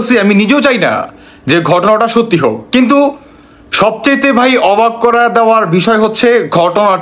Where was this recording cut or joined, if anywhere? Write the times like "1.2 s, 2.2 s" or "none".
none